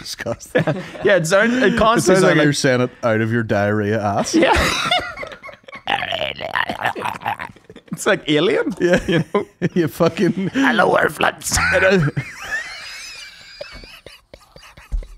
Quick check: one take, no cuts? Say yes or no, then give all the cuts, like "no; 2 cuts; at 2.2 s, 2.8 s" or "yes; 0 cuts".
yes; 0 cuts